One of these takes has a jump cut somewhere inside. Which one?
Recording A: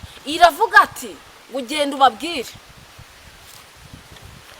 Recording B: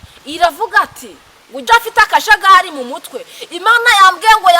B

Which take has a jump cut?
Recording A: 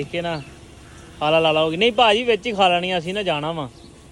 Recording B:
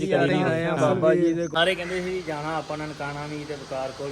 B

